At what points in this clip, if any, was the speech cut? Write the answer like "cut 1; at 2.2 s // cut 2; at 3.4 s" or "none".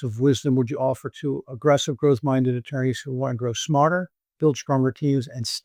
none

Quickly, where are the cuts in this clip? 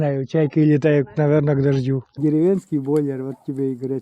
cut 1; at 2.1 s

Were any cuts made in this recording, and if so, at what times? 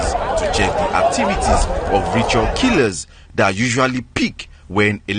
none

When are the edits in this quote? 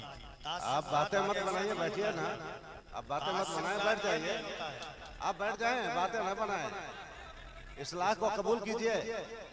none

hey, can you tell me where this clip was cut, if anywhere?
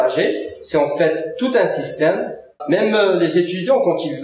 cut 1; at 2.6 s

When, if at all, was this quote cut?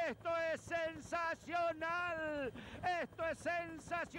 none

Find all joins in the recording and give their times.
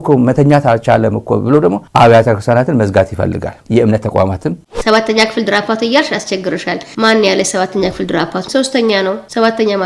cut 1; at 4.7 s // cut 2; at 8.4 s

